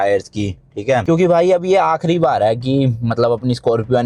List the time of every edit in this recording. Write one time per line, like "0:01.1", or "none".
0:01.0